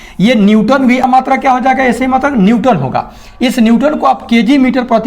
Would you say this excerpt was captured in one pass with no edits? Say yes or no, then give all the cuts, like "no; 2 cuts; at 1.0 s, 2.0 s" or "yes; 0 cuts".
no; 1 cut; at 1.0 s